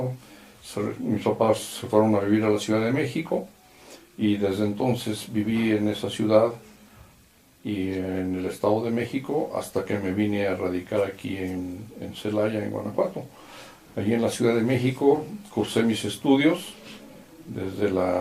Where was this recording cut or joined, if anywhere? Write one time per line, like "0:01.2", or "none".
0:10.8

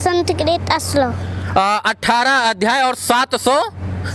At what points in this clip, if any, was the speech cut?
none

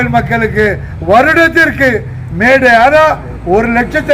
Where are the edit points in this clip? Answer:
none

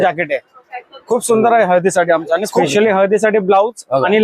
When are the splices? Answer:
0:02.7

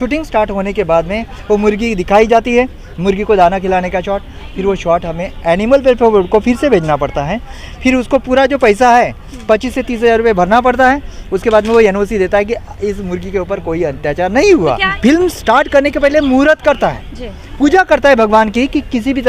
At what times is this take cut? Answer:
0:14.9

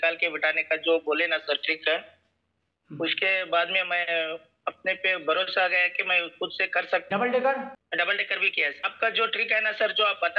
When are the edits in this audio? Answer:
0:07.0
0:07.8
0:08.9

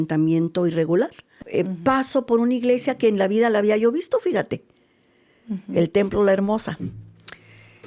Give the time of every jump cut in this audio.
0:01.2

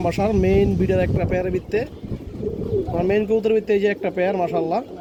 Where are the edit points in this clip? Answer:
none

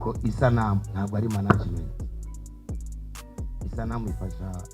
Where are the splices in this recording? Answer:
0:02.0
0:03.5

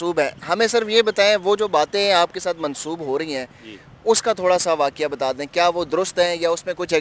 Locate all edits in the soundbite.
none

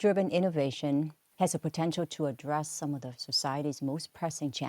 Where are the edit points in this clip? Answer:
0:01.2

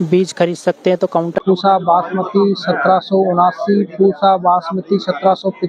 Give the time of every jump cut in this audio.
0:01.4

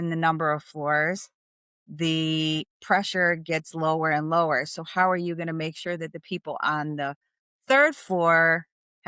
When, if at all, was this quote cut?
none

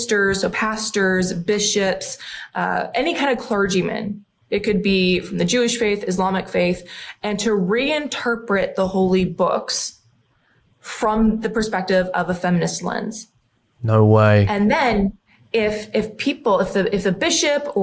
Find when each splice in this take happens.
none

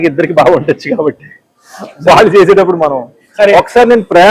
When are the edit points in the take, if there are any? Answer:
none

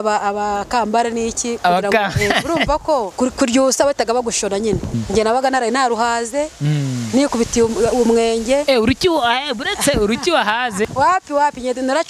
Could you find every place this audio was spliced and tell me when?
0:03.1
0:04.9
0:10.9

